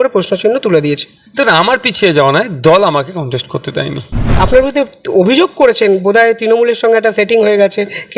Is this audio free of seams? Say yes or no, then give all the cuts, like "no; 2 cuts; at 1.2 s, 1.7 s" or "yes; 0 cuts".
no; 1 cut; at 4.3 s